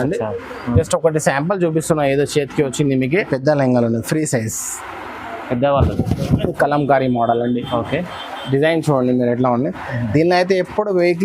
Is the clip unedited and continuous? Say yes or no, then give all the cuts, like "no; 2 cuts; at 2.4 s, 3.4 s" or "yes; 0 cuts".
no; 1 cut; at 3.1 s